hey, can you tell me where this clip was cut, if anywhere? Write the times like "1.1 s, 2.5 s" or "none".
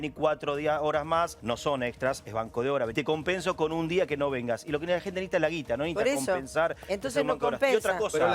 1.4 s, 2.9 s